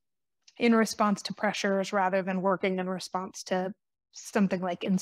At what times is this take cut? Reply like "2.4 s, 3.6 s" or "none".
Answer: none